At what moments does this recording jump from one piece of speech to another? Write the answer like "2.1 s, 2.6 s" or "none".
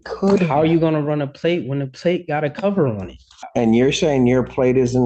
3.4 s